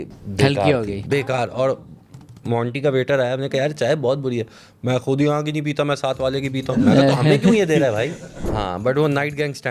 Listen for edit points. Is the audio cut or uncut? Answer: cut